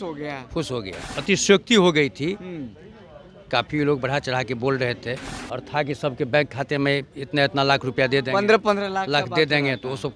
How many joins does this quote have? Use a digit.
2